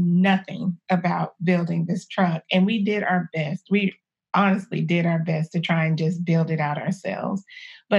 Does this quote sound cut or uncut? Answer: uncut